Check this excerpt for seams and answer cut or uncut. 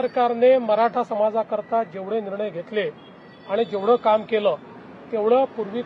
uncut